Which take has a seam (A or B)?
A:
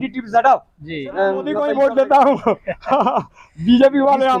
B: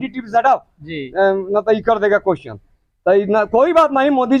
A